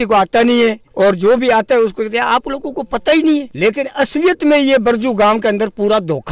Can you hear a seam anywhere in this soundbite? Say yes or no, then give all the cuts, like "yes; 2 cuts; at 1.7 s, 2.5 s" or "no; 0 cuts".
no; 0 cuts